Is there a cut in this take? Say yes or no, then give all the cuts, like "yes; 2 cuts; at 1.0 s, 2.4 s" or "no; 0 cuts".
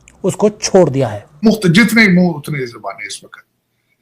yes; 1 cut; at 1.4 s